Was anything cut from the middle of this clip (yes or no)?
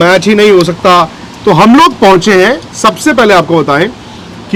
no